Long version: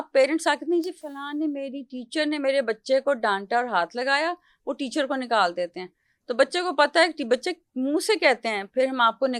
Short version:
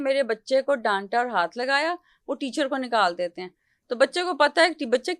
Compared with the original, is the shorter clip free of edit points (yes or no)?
yes